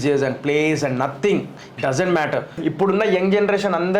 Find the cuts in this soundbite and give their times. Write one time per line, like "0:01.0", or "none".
0:02.5